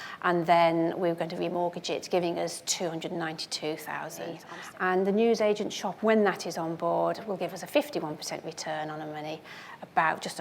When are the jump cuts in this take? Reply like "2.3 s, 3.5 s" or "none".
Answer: 4.5 s